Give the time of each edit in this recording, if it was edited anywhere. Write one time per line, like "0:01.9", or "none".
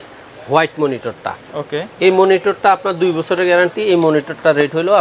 none

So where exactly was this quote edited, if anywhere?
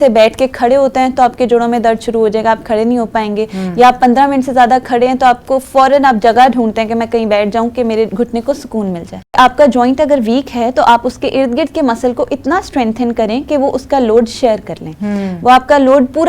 0:09.4

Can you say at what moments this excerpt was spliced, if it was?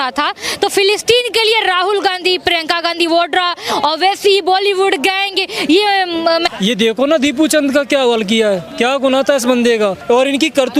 0:06.5
0:08.7
0:10.0

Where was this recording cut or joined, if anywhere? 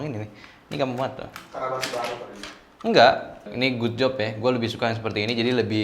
0:03.5

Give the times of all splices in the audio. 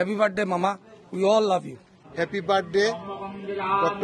0:02.0

